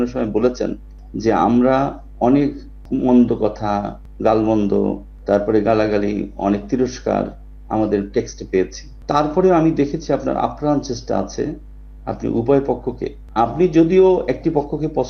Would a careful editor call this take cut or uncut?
uncut